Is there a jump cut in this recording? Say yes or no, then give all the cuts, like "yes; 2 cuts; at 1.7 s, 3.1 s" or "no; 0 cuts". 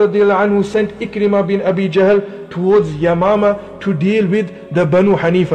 yes; 1 cut; at 2.4 s